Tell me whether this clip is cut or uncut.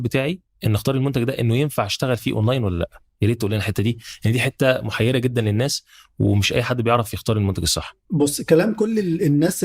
uncut